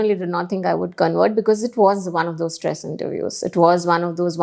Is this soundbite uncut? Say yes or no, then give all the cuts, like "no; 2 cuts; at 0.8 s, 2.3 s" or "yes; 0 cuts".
yes; 0 cuts